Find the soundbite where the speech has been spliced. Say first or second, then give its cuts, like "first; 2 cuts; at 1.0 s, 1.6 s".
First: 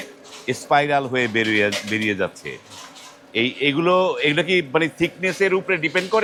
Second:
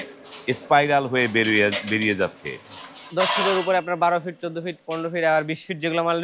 second; 1 cut; at 3.1 s